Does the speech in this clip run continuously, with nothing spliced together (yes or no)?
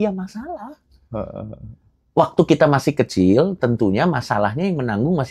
yes